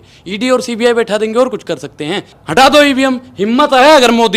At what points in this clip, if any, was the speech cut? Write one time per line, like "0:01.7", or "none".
0:02.4